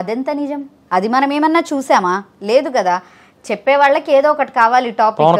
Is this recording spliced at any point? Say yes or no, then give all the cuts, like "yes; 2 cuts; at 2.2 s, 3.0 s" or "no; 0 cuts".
no; 0 cuts